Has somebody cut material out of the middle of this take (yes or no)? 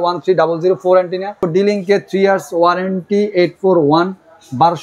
yes